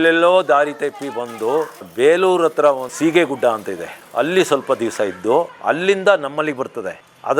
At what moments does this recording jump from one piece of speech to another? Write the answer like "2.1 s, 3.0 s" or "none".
none

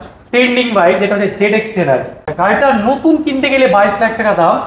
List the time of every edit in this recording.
2.2 s

